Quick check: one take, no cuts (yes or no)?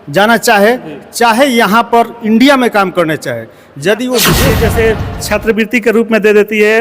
no